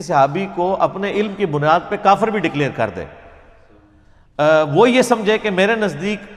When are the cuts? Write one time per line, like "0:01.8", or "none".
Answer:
none